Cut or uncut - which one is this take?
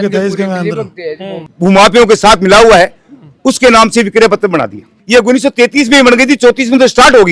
cut